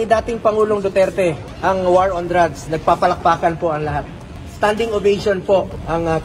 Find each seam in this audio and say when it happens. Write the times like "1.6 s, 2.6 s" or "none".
4.2 s